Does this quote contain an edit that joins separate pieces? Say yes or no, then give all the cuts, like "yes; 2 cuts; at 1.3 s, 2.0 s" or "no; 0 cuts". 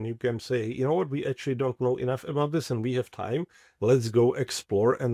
no; 0 cuts